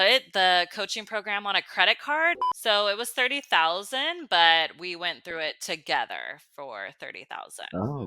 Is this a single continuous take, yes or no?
no